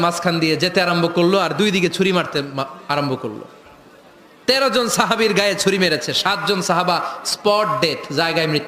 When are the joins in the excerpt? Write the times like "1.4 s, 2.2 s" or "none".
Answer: none